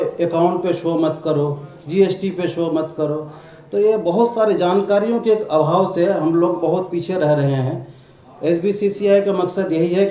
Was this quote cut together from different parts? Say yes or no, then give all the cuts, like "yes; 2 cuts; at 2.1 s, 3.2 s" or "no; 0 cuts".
no; 0 cuts